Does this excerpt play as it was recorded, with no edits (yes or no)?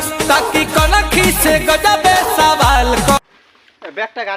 no